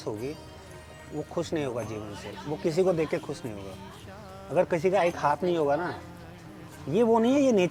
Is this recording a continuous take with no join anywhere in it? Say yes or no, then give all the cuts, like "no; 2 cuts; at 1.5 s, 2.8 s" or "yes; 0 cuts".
yes; 0 cuts